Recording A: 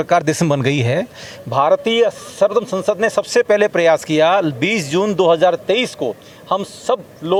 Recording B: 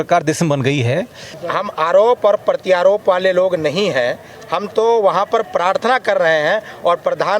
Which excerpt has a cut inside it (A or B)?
B